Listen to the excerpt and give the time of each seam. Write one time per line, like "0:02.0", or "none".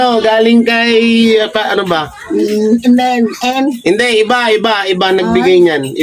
none